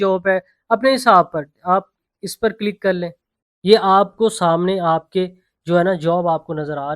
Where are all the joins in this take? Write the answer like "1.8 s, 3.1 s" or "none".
3.3 s